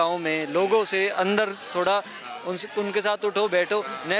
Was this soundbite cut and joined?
no; 0 cuts

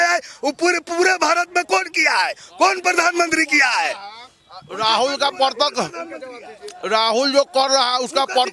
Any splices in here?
no; 0 cuts

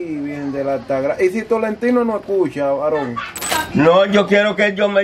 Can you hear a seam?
yes; 1 cut; at 3.5 s

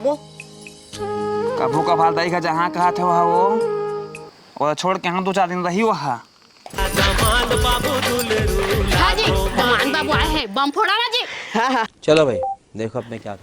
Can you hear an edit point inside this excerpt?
yes; 1 cut; at 6.7 s

